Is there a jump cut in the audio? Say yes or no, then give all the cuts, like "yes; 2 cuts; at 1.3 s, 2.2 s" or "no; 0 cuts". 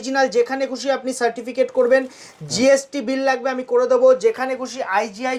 no; 0 cuts